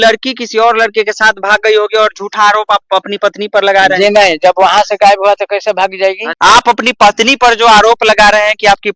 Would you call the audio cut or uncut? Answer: cut